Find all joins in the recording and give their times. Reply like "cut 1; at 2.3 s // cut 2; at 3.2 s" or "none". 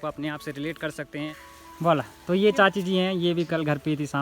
cut 1; at 1.4 s